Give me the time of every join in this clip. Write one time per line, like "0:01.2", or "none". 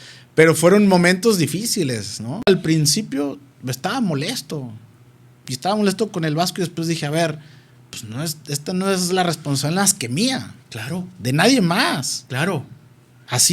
0:02.5

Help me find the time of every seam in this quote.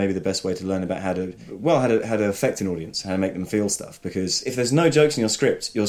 0:01.4
0:04.4

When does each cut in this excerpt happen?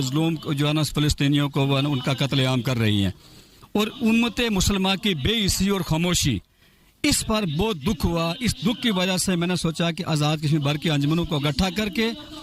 none

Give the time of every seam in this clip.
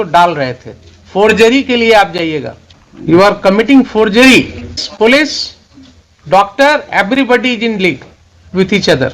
0:03.2
0:04.8

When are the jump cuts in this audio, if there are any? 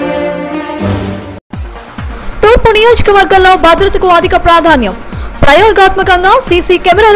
0:01.5

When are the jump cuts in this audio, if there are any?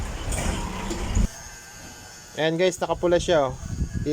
0:01.3

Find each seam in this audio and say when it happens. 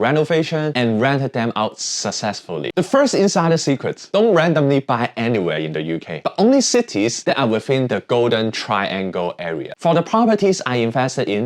0:02.7
0:09.7

